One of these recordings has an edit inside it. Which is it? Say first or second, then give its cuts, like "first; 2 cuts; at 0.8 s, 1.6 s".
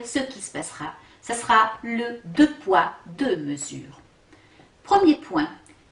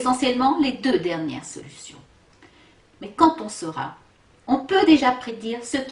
second; 1 cut; at 3.4 s